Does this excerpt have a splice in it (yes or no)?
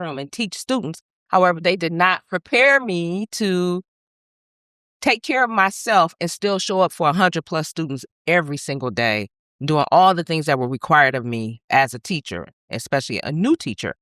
no